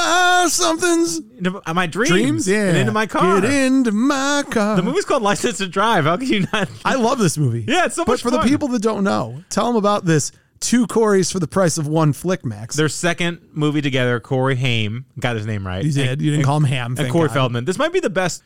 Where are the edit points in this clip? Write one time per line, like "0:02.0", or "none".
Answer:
0:06.7